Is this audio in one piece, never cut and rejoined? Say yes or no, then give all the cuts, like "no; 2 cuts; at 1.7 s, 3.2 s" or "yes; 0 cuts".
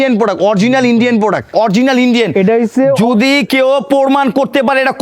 no; 1 cut; at 1.5 s